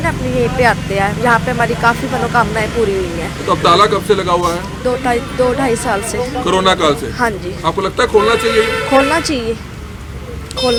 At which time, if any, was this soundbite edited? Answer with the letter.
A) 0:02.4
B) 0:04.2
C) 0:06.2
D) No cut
D